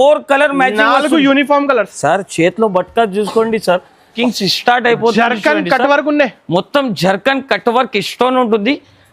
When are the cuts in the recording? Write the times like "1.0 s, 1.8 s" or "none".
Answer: 4.1 s